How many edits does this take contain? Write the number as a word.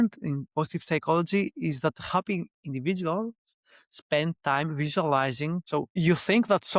one